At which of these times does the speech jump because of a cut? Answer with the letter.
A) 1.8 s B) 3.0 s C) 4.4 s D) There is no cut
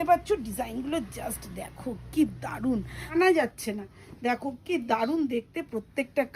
B